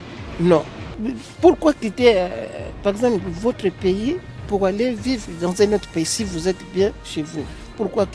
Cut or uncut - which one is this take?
uncut